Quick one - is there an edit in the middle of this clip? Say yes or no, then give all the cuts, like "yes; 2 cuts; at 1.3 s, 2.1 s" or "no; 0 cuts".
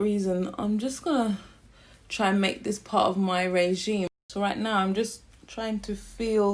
yes; 1 cut; at 4.1 s